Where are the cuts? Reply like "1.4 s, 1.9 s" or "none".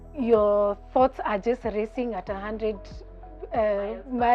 none